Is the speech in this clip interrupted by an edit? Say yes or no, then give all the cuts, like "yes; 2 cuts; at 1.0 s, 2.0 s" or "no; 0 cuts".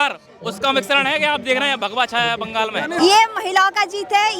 yes; 1 cut; at 3.0 s